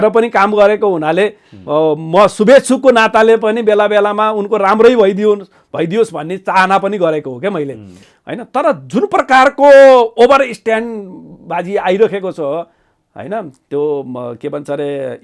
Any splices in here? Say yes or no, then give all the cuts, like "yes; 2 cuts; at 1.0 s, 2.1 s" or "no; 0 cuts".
no; 0 cuts